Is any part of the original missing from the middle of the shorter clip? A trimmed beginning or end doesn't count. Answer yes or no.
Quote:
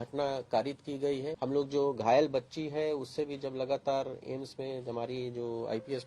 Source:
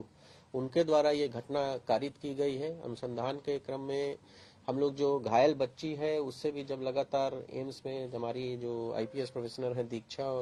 yes